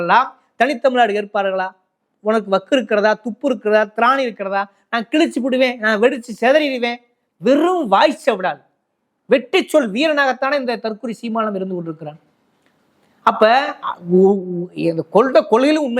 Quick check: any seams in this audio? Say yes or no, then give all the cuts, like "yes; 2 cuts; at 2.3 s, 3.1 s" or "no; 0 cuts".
no; 0 cuts